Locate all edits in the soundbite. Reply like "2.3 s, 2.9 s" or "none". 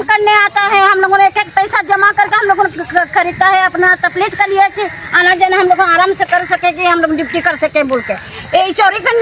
none